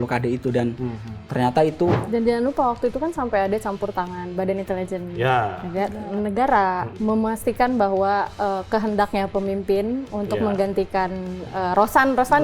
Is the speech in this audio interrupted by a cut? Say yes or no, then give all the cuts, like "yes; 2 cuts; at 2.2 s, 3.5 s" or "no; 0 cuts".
yes; 2 cuts; at 2.0 s, 6.9 s